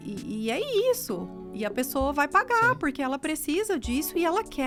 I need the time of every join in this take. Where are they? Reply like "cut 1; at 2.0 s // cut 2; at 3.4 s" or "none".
none